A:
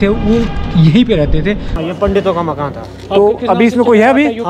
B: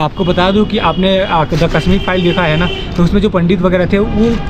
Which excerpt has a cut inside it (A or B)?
A